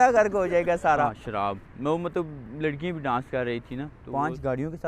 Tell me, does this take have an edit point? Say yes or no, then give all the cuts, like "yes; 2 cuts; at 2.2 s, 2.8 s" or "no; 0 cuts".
yes; 2 cuts; at 1.2 s, 4.0 s